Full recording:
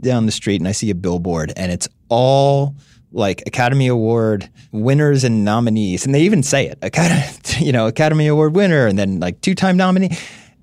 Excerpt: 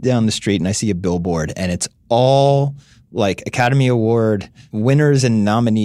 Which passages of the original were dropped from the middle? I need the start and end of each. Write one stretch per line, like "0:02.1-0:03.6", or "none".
none